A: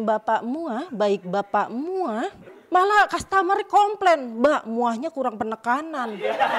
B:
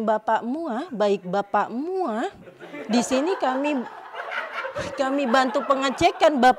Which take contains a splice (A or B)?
A